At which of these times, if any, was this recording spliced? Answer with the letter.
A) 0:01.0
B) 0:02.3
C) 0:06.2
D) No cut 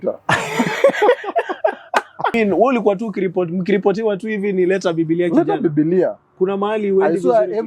B